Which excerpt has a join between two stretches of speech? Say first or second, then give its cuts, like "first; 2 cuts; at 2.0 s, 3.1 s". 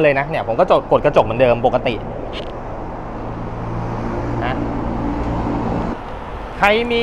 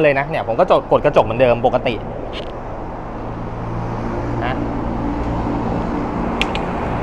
first; 1 cut; at 5.9 s